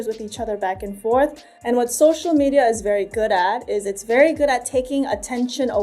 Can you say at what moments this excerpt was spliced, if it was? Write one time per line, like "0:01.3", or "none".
0:01.5